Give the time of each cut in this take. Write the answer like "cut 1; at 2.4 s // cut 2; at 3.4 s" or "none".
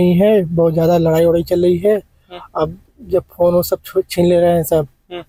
none